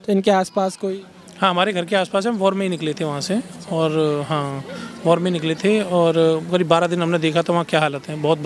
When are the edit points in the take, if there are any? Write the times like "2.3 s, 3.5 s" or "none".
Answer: none

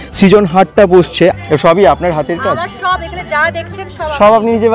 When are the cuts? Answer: 1.4 s

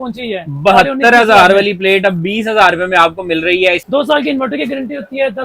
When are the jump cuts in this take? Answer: 3.8 s

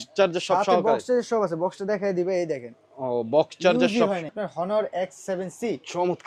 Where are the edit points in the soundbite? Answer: 4.3 s

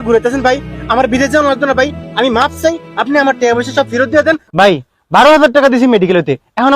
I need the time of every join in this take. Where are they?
4.5 s

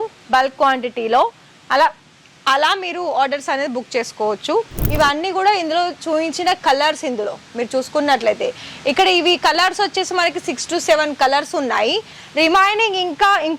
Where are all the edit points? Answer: 4.8 s

